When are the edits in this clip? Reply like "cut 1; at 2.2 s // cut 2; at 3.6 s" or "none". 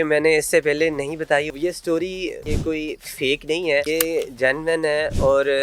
cut 1; at 1.5 s // cut 2; at 2.5 s // cut 3; at 3.9 s